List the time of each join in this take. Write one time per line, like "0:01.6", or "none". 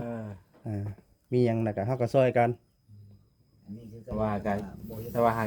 0:04.1